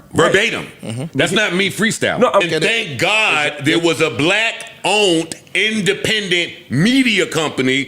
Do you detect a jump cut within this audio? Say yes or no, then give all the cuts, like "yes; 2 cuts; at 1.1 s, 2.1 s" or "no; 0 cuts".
yes; 1 cut; at 2.4 s